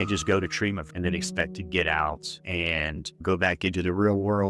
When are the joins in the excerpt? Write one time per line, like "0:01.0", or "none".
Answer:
0:00.9
0:02.3